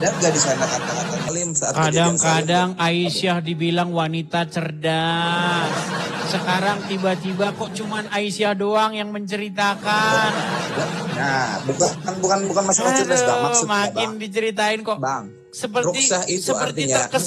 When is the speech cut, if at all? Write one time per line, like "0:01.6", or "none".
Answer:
0:01.3